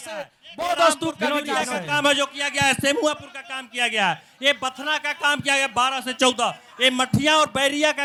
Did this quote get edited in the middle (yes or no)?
no